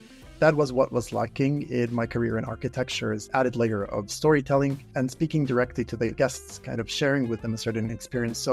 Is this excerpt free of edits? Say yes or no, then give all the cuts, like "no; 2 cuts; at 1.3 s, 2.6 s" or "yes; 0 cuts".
no; 2 cuts; at 3.2 s, 4.9 s